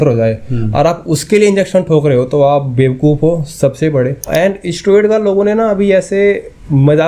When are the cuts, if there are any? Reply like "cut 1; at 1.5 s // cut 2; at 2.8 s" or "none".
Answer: cut 1; at 4.2 s